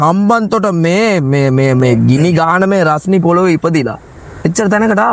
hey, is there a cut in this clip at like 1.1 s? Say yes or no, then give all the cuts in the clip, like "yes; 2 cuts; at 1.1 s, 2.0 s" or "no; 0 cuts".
no; 0 cuts